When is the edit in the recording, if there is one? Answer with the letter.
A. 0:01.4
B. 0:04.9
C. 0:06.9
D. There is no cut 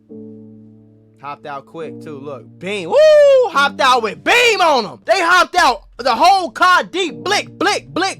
B